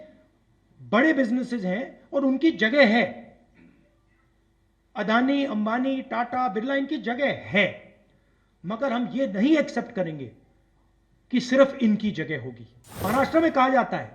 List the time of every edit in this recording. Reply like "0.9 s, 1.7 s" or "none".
12.9 s